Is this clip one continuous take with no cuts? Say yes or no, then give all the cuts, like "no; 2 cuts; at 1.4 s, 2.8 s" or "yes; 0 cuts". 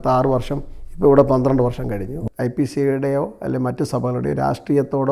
no; 1 cut; at 2.2 s